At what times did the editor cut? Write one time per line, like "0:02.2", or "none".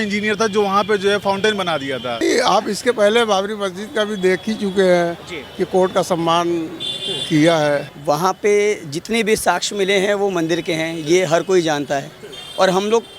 0:02.2
0:07.9

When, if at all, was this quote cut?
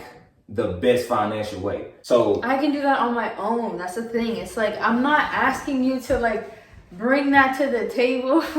0:01.9

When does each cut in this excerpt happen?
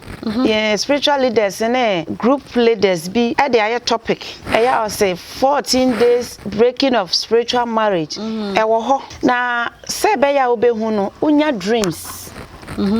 0:02.1
0:03.3
0:04.3
0:06.4
0:09.1

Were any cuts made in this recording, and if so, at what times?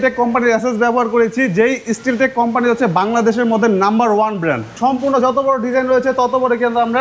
0:04.7

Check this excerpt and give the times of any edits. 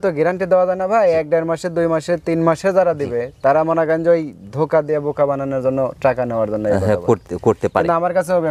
none

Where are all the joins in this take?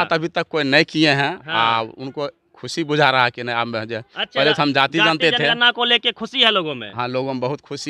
none

